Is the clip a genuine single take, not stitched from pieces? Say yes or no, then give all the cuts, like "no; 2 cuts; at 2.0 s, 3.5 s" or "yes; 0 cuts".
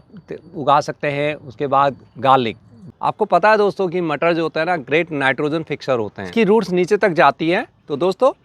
no; 2 cuts; at 2.9 s, 6.2 s